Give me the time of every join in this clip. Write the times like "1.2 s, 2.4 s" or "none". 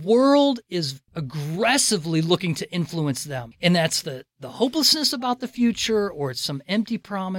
1.0 s, 3.5 s